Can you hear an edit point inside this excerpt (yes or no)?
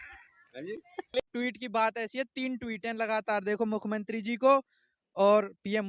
yes